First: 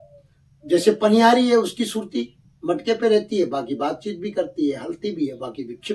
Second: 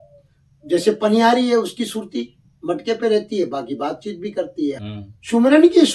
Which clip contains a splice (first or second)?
second